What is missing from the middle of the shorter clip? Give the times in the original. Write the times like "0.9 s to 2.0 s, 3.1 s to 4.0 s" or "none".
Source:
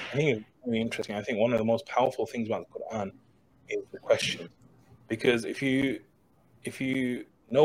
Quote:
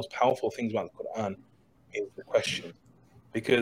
none